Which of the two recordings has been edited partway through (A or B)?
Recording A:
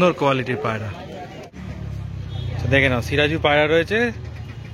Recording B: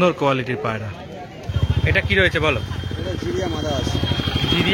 A